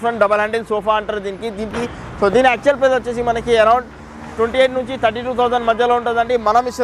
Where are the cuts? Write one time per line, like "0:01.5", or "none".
0:01.7